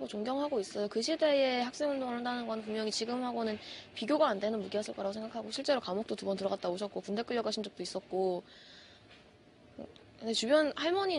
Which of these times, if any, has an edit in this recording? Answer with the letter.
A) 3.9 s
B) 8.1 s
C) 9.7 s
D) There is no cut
C